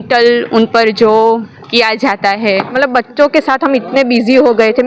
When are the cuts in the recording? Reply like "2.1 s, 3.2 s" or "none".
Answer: 2.7 s